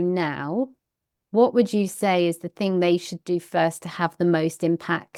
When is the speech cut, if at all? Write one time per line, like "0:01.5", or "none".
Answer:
none